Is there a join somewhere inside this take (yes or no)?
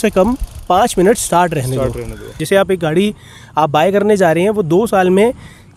yes